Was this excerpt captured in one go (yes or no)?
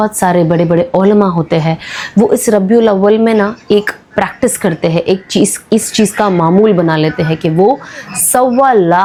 yes